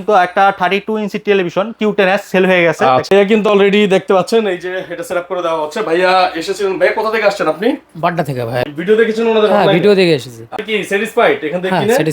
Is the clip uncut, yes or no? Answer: no